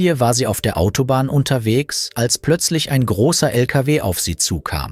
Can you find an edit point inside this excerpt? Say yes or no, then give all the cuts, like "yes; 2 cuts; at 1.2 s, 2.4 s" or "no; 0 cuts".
no; 0 cuts